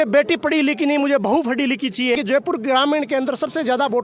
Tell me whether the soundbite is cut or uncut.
cut